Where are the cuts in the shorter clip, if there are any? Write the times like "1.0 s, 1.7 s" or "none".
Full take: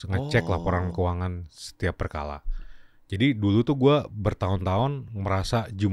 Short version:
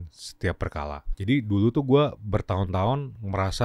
1.1 s